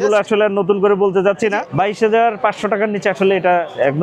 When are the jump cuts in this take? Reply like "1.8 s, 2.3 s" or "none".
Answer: 1.6 s